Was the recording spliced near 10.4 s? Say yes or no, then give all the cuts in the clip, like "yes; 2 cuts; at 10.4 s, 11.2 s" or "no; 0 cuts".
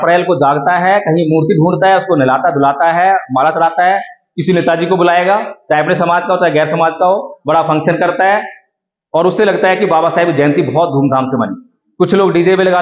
no; 0 cuts